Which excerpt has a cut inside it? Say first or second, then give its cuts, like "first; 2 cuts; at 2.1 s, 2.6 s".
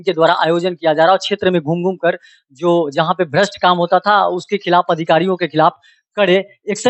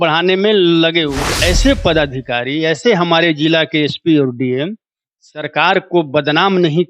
second; 1 cut; at 1.3 s